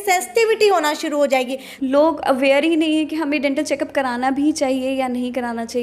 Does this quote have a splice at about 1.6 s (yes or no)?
yes